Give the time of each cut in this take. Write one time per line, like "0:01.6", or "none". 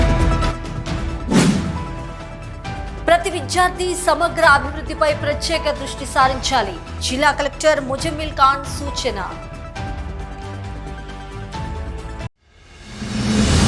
none